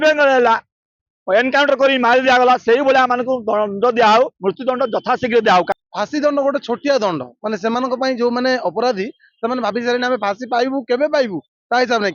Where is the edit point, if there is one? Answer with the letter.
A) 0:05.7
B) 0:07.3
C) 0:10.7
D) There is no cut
A